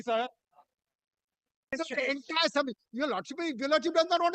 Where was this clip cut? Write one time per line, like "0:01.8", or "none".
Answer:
0:01.7